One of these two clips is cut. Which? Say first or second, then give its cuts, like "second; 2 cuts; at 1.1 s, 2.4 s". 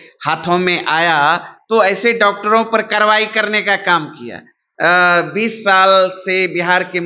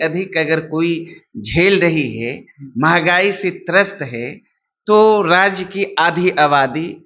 first; 1 cut; at 4.6 s